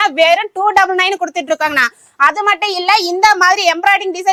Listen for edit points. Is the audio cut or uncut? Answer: uncut